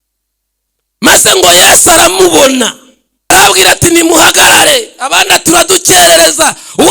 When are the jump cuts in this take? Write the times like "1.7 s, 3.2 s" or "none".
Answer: 3.3 s